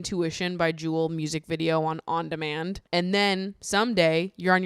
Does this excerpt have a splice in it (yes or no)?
yes